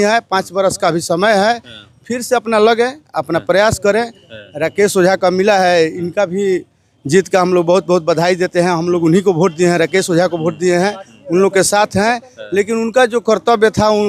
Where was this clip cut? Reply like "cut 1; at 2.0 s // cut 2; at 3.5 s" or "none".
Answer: none